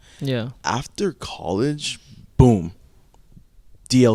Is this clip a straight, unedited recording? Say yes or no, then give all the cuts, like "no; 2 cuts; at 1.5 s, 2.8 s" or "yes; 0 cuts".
yes; 0 cuts